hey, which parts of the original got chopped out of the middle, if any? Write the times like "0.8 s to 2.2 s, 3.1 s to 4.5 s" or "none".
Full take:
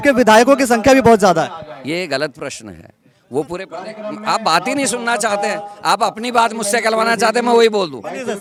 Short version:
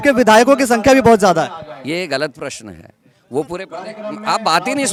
none